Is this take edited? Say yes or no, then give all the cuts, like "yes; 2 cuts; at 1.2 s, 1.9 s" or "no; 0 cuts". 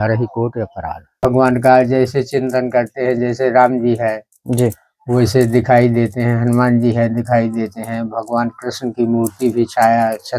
yes; 1 cut; at 1.2 s